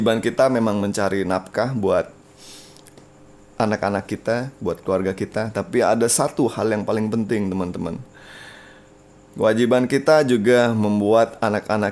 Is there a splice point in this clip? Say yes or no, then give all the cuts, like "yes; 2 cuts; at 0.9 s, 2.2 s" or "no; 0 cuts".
no; 0 cuts